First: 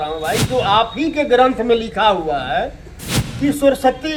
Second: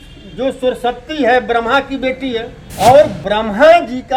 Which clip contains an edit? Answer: second; 1 cut; at 2.6 s

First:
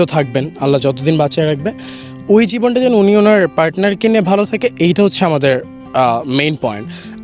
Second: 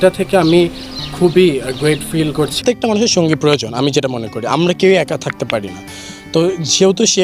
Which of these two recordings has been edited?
second; 1 cut; at 2.6 s

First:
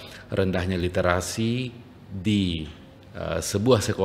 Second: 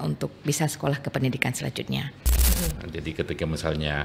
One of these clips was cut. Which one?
second; 1 cut; at 2.5 s

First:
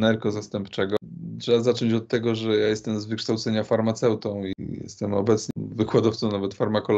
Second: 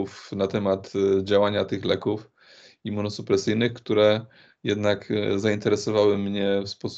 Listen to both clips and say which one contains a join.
first; 3 cuts; at 1.0 s, 4.5 s, 5.5 s

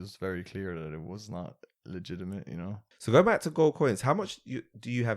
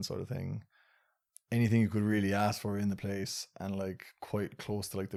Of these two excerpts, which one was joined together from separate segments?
first; 1 cut; at 2.9 s

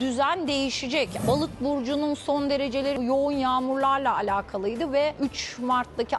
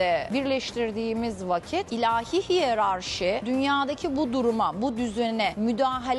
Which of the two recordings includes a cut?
first; 2 cuts; at 1.2 s, 3.0 s

